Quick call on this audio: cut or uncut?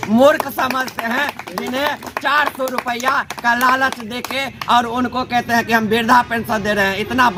uncut